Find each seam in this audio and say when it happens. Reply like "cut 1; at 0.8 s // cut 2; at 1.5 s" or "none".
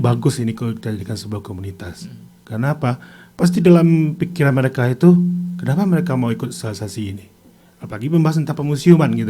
none